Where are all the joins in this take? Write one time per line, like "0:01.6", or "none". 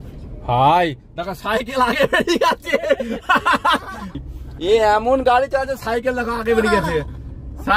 0:04.2

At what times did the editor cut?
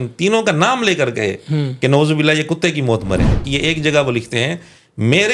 0:03.4

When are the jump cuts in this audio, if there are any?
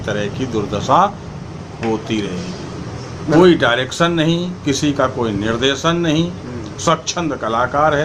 0:03.3

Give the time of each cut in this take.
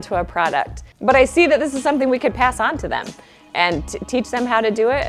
none

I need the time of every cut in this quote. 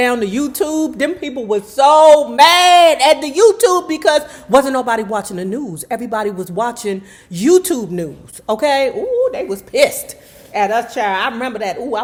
none

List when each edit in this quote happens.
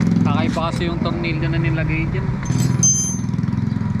none

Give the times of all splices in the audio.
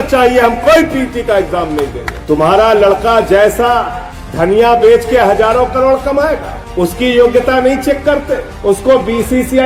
0:02.1

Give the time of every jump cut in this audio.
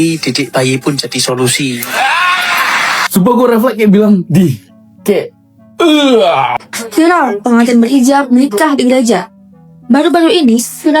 0:06.6

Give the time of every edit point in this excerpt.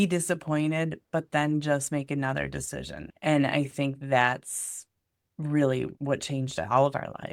0:03.1
0:05.9

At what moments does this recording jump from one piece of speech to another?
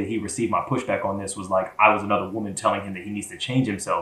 none

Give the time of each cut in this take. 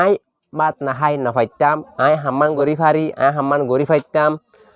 0:02.6

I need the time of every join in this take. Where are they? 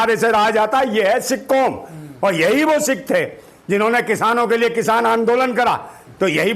none

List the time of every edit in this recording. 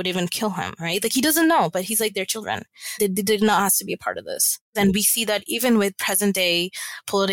0:04.8

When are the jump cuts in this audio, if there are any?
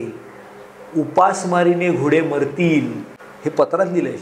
0:03.2

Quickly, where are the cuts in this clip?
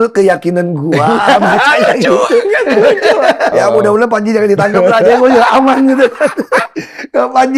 0:03.5

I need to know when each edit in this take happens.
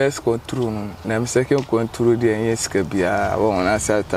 0:00.9

